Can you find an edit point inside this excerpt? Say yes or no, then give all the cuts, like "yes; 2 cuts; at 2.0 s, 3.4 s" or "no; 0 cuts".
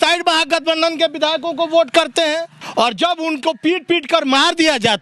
yes; 1 cut; at 2.6 s